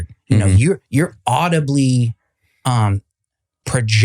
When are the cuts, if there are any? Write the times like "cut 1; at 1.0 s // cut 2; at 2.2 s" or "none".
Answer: none